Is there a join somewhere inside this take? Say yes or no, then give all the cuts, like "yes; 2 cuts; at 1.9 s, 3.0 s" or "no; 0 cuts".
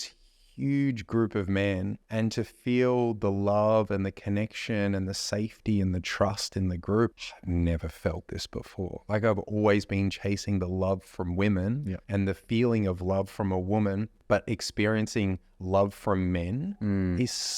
yes; 4 cuts; at 2.0 s, 7.1 s, 11.9 s, 14.1 s